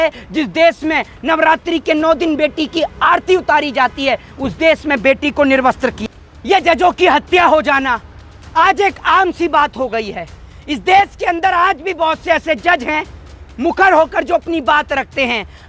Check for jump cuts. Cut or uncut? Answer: cut